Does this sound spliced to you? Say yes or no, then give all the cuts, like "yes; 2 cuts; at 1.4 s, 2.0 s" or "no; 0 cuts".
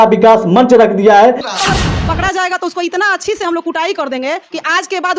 yes; 1 cut; at 1.4 s